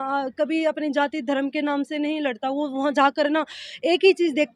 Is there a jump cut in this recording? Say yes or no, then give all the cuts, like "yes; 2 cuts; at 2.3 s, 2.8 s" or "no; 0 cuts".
no; 0 cuts